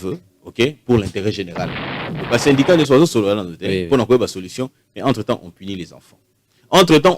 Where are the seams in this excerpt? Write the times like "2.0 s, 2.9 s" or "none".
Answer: 2.0 s